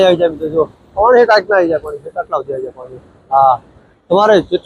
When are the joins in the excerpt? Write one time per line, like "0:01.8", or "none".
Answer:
none